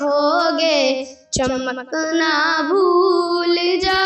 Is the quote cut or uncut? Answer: uncut